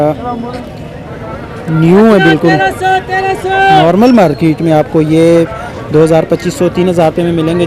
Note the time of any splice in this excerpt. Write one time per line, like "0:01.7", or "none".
none